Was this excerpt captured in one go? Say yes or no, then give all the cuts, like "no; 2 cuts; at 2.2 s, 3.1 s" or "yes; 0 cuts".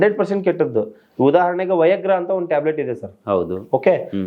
yes; 0 cuts